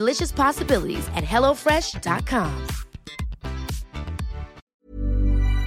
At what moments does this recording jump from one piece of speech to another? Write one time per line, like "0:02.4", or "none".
0:04.7